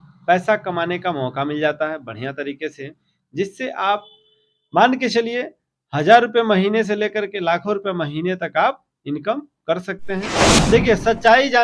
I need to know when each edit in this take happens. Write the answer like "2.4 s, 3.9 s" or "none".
10.5 s